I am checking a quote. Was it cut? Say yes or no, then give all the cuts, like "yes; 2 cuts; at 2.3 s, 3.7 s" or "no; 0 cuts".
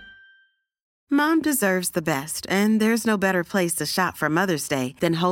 no; 0 cuts